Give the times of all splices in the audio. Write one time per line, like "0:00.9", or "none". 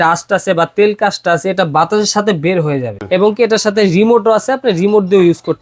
0:02.9